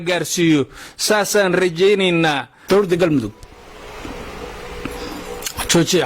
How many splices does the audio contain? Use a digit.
1